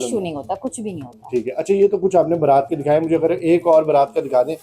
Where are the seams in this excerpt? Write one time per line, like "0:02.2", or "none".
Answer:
none

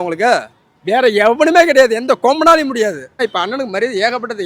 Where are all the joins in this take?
0:03.2

